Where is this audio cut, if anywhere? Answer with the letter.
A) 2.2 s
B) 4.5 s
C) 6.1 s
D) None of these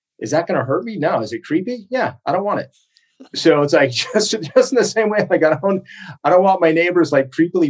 D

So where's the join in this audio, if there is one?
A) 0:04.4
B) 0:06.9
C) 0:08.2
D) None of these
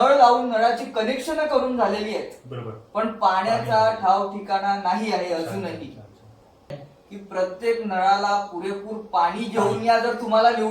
B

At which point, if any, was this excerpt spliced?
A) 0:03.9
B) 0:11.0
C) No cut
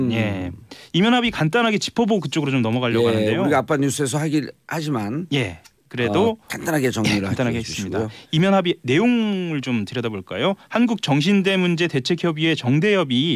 C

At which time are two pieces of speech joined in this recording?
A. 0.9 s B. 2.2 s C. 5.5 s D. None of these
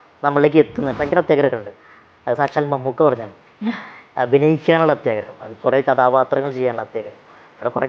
A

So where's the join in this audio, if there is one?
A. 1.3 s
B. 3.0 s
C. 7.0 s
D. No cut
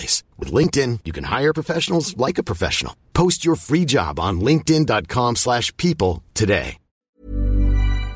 C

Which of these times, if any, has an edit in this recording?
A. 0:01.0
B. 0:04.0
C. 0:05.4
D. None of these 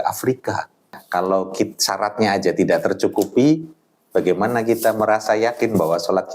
A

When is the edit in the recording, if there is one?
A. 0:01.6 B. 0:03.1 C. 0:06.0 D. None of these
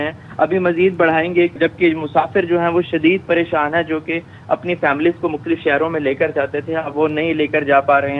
A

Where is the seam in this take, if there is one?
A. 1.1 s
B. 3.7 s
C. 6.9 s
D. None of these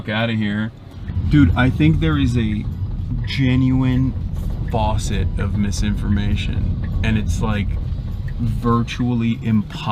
A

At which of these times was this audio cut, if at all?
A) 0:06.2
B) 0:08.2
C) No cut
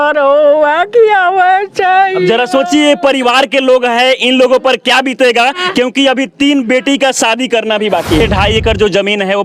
B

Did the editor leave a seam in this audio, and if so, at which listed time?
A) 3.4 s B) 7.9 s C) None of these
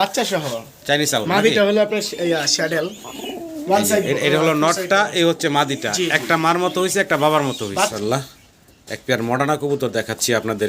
B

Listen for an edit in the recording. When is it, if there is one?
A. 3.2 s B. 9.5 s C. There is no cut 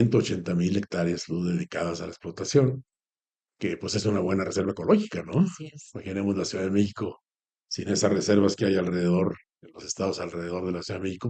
C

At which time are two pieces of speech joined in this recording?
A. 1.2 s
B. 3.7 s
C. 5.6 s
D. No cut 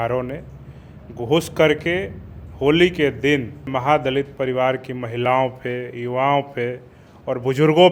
B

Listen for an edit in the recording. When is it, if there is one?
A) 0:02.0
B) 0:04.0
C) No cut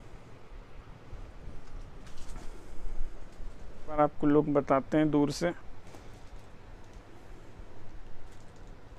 B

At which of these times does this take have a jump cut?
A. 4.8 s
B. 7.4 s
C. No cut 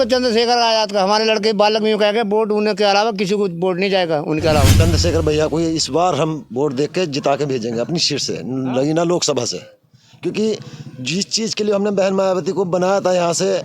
A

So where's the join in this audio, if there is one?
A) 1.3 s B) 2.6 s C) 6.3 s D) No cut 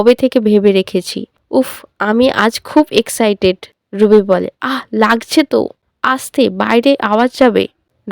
A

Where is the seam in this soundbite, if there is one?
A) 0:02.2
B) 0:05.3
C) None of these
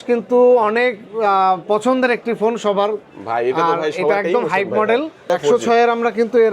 B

